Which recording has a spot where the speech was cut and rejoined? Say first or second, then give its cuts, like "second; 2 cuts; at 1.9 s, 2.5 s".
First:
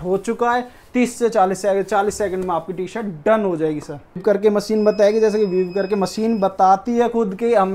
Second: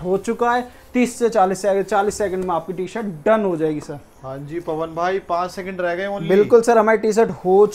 first; 1 cut; at 4.2 s